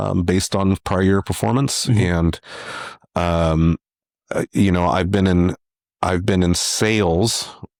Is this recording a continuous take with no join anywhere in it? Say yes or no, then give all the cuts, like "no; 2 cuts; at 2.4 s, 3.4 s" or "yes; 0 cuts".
yes; 0 cuts